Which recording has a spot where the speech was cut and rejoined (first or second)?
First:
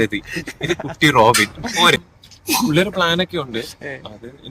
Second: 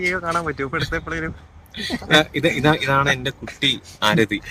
first